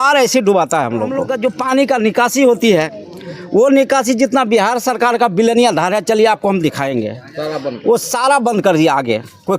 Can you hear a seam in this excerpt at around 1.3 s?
yes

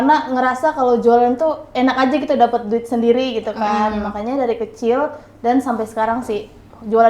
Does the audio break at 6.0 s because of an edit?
no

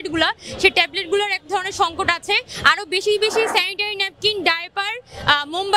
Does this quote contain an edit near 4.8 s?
no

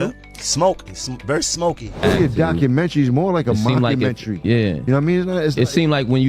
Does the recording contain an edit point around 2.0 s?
yes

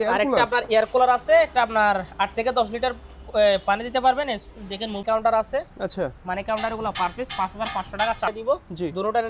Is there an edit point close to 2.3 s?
no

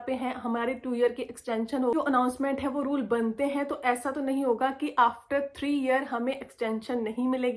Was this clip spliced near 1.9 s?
yes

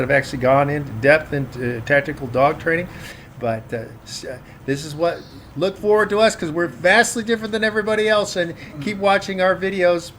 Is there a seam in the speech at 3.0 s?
no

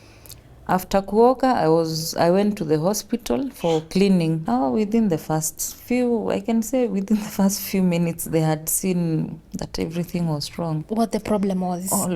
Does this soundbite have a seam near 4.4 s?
yes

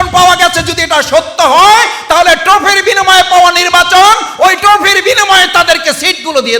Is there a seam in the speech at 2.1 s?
no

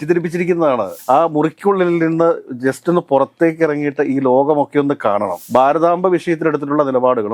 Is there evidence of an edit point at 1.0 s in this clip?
yes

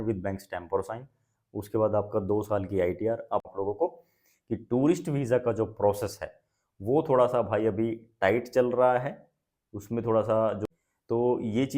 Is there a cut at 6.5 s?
no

